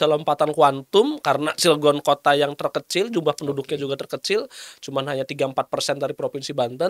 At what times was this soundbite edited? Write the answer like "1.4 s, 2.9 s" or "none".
none